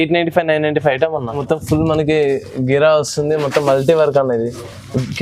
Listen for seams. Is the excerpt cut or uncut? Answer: cut